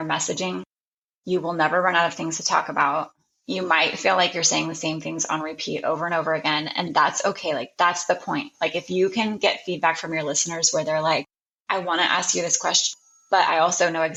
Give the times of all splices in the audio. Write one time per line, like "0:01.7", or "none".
none